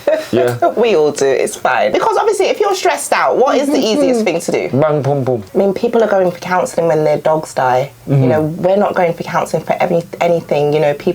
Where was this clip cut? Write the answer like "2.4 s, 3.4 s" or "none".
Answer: 1.9 s, 5.4 s

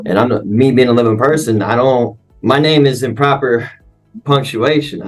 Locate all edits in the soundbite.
2.2 s

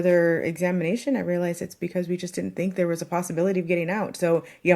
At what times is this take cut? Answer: none

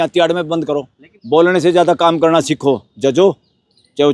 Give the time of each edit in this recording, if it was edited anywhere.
1.1 s

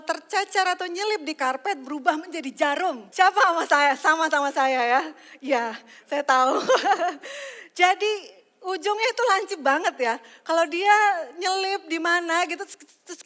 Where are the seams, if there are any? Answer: 3.0 s

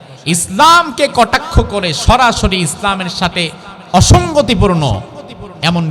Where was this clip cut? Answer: none

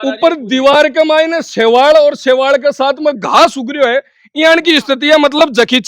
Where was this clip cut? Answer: none

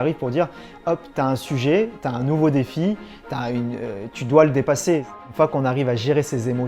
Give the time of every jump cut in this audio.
5.2 s

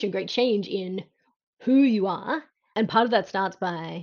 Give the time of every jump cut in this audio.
2.7 s

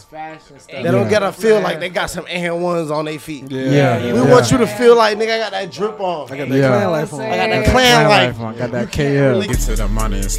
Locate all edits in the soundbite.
9.5 s

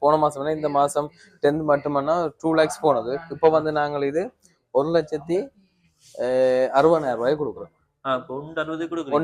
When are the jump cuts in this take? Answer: none

